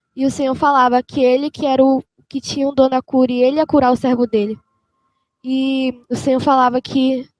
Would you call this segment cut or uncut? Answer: uncut